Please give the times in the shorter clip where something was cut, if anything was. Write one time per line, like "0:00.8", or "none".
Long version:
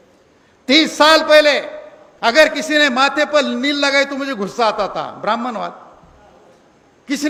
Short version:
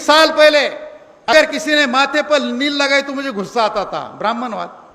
0:01.3